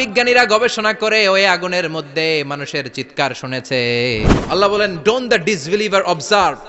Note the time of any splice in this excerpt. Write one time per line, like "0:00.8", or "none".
0:04.4